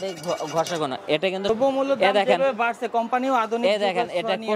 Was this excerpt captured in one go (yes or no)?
no